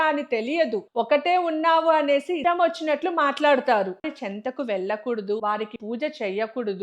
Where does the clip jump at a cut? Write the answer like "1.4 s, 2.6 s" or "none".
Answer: 4.1 s